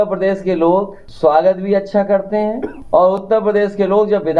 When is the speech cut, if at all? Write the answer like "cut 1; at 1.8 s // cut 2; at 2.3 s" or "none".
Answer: cut 1; at 1.0 s // cut 2; at 2.7 s